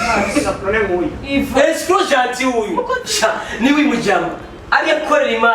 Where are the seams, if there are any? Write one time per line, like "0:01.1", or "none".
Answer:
0:03.0